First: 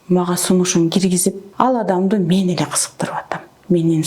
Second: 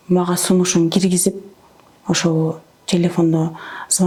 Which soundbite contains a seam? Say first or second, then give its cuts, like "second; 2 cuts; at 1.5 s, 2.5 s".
first; 1 cut; at 1.4 s